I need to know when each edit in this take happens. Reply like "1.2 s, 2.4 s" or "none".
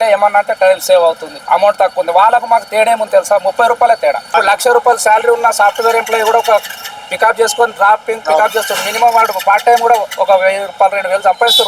1.3 s, 4.2 s